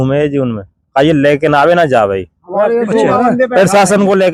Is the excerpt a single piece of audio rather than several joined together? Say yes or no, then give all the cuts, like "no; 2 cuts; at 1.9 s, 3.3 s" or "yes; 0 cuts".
yes; 0 cuts